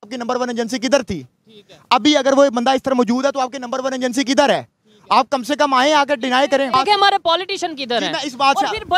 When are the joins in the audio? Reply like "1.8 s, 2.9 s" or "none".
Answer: none